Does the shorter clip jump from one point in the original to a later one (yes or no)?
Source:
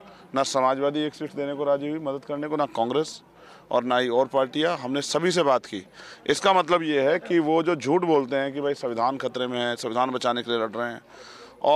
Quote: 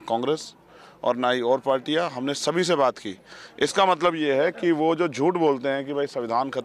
no